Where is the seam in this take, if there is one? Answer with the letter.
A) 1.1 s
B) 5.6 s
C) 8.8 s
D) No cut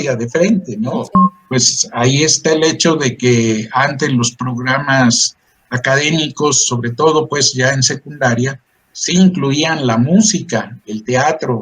A